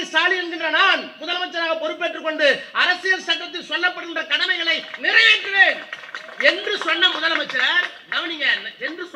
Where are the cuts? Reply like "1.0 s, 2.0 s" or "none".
none

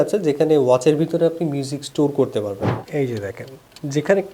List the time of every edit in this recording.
2.7 s

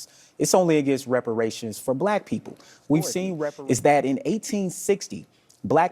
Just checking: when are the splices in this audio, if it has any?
3.3 s

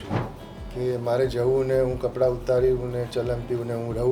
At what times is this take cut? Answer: none

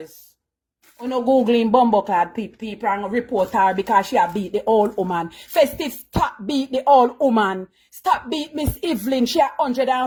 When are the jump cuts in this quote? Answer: none

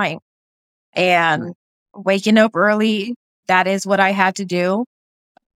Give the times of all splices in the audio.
1.9 s, 3.4 s

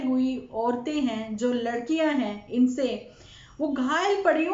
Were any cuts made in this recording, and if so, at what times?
none

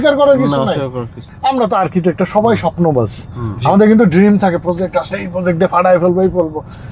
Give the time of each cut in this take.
1.2 s

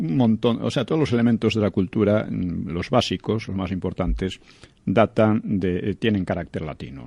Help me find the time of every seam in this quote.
2.3 s

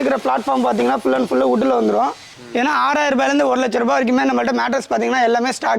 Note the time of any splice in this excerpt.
2.4 s

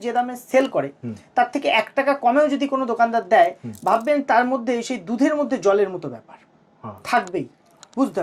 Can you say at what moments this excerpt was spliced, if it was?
none

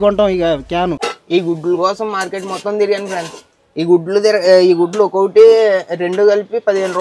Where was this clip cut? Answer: 1.1 s

